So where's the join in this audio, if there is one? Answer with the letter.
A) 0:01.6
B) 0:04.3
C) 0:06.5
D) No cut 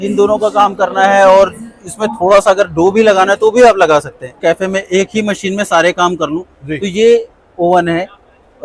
B